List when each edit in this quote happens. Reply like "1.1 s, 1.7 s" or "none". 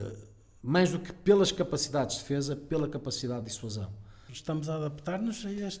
4.3 s

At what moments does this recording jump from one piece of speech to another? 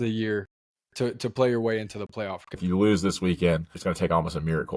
2.6 s, 3.7 s

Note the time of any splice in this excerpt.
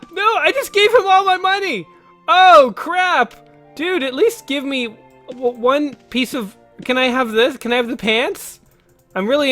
none

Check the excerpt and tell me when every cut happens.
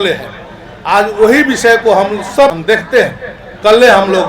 2.6 s

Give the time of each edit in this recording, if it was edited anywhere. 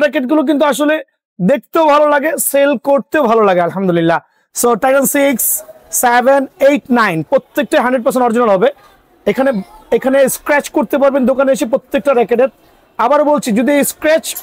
none

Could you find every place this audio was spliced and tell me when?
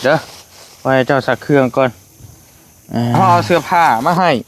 3.2 s

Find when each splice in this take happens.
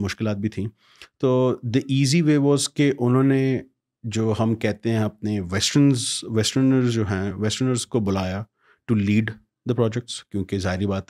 none

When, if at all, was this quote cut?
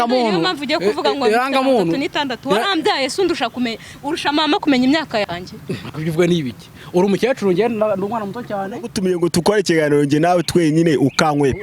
8.9 s

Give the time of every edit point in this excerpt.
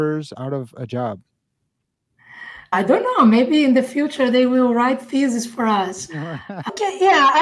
2.7 s, 6.7 s

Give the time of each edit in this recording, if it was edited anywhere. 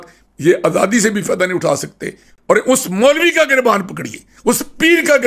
2.3 s

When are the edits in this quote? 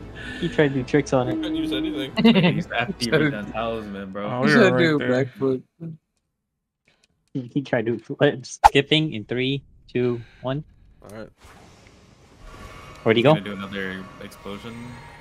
8.6 s

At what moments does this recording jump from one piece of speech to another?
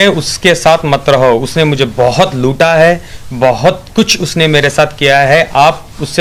none

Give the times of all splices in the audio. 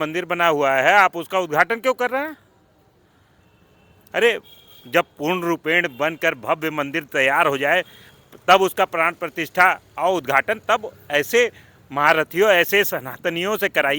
none

